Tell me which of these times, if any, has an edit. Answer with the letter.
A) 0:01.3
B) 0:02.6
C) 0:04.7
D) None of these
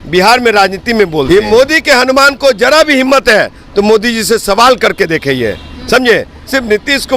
A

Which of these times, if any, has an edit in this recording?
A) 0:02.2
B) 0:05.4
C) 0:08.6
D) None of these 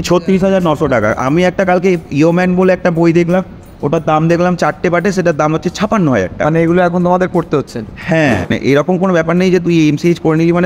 C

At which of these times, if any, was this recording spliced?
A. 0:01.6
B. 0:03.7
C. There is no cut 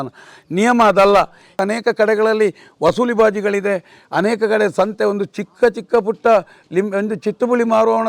A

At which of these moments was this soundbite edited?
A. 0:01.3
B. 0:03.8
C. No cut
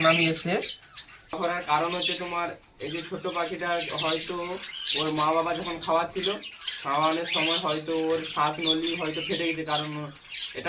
A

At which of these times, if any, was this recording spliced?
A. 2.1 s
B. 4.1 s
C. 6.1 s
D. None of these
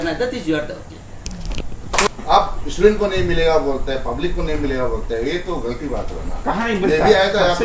A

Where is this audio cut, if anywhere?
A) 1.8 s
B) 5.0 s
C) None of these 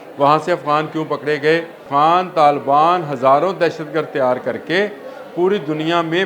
A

